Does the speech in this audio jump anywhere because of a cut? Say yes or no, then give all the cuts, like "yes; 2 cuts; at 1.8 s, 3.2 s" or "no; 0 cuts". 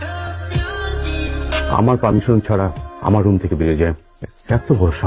no; 0 cuts